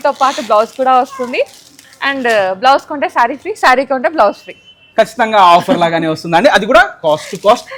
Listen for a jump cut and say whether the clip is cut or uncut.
uncut